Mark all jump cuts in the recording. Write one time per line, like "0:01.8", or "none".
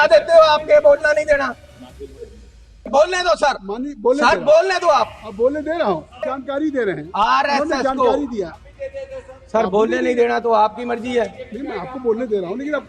0:02.9
0:06.3